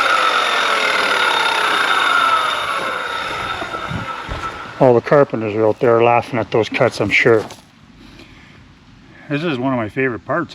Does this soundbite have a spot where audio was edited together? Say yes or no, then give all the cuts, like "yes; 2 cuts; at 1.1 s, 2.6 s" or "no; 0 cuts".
yes; 1 cut; at 7.5 s